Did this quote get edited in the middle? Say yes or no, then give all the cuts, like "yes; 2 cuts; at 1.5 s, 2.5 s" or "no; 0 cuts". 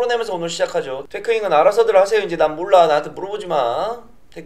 yes; 1 cut; at 1.1 s